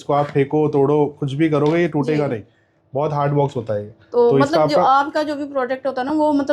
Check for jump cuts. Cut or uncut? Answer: uncut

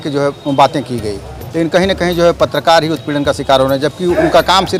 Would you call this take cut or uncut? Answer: uncut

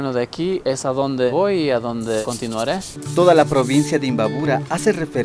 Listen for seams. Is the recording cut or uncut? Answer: cut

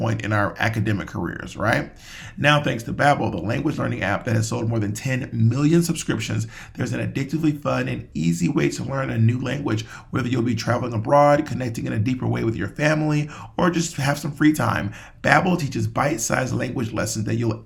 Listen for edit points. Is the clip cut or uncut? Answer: uncut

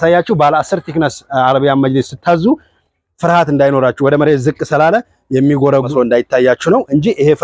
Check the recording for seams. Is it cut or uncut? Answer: cut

